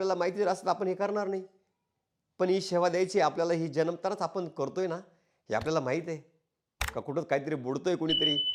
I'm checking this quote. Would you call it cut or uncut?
uncut